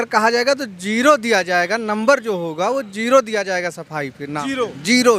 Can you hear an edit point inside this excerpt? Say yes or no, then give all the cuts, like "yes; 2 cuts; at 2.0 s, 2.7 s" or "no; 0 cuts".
no; 0 cuts